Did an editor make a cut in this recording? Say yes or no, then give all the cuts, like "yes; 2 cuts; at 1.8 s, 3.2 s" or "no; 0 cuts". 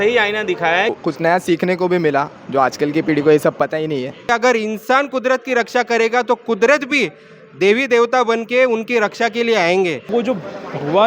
yes; 3 cuts; at 1.0 s, 4.3 s, 10.0 s